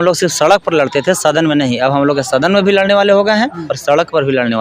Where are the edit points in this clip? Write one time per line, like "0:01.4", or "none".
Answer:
0:03.7